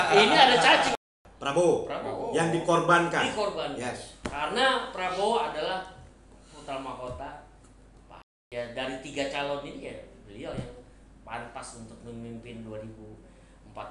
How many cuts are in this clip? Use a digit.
2